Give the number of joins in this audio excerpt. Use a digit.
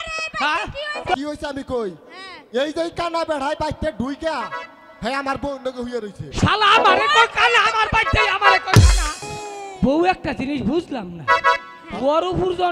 2